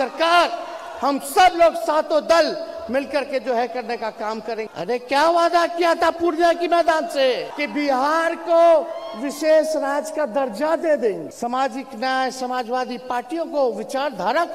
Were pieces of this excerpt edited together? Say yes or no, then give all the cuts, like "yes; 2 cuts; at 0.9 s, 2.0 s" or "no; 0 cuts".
yes; 3 cuts; at 4.7 s, 7.5 s, 11.3 s